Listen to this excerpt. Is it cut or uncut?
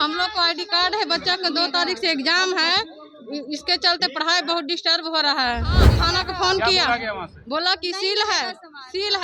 cut